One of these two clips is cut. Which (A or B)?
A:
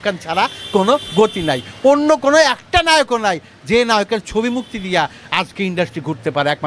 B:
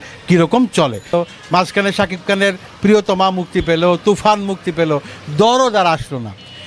B